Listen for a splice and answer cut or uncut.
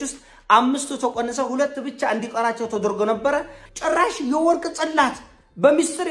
cut